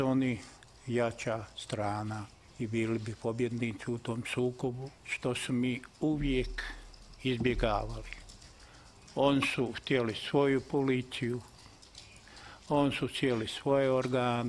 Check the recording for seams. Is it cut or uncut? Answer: cut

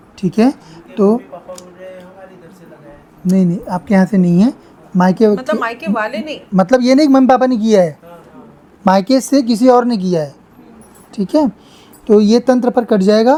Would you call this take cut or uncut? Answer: uncut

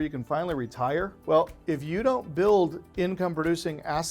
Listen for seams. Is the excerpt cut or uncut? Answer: cut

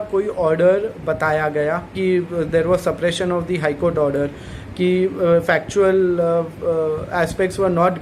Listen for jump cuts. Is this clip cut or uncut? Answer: cut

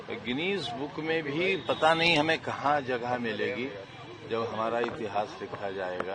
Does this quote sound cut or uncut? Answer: uncut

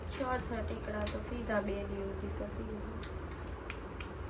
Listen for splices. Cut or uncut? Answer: uncut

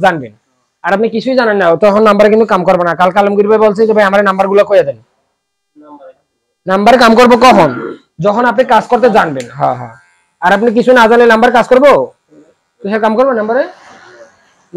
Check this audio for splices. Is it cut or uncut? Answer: uncut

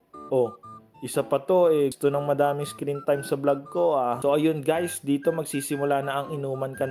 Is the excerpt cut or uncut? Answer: cut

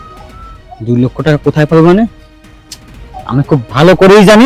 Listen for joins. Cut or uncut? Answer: uncut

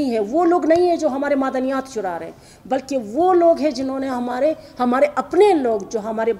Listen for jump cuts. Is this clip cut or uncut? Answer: uncut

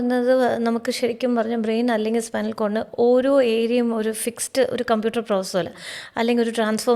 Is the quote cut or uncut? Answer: uncut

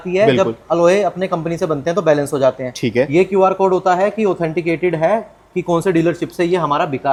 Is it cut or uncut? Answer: uncut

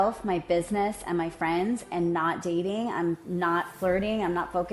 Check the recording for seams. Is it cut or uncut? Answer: uncut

